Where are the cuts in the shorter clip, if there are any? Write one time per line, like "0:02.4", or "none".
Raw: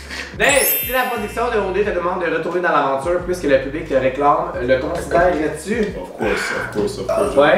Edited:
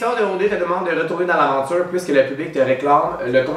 none